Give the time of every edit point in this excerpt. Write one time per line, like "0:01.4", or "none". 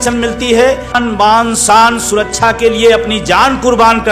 0:01.0